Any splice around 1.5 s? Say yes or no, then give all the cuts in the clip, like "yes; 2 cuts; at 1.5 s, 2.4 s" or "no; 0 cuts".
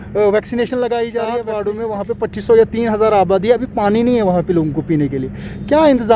yes; 1 cut; at 1.5 s